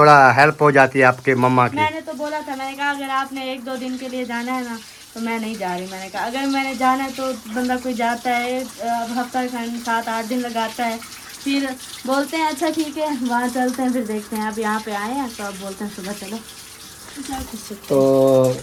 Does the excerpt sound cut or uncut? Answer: uncut